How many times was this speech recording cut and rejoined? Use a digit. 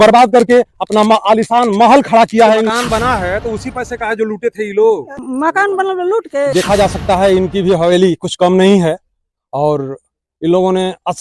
2